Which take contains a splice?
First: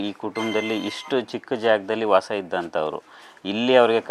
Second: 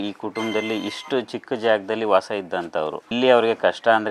second; 1 cut; at 3.0 s

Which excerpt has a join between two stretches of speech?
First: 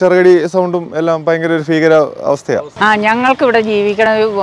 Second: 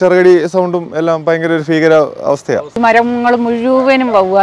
second; 1 cut; at 2.8 s

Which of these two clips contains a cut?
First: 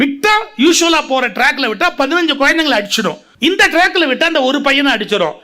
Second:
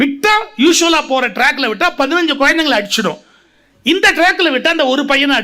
first; 1 cut; at 3.2 s

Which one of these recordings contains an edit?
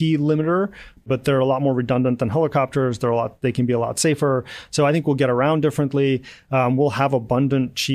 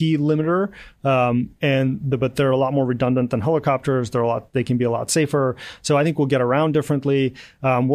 first; 1 cut; at 1.0 s

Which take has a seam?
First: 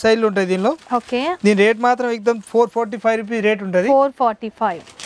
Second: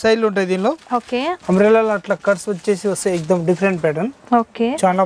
second; 1 cut; at 1.3 s

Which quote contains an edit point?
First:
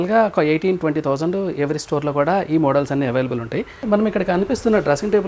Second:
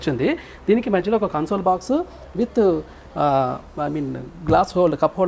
first; 1 cut; at 3.8 s

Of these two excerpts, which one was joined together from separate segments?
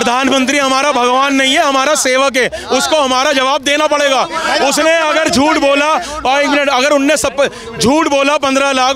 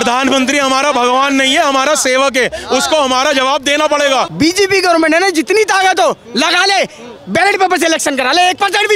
second; 1 cut; at 4.3 s

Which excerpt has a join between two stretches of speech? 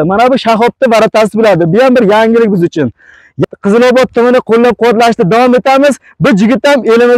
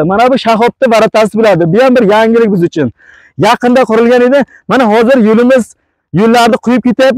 first; 1 cut; at 3.4 s

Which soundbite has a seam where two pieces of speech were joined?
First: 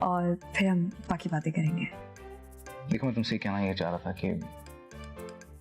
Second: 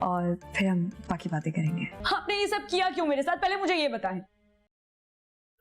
second; 1 cut; at 2.0 s

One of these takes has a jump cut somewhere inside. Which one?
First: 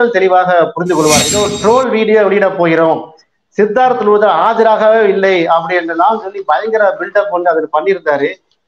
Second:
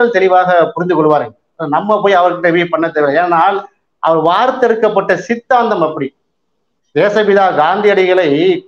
first; 1 cut; at 1.4 s

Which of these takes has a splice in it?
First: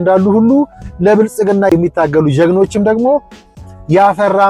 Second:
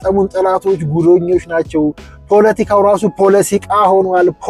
first; 1 cut; at 1.7 s

